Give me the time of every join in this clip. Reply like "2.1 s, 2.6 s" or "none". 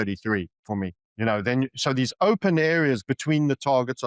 1.0 s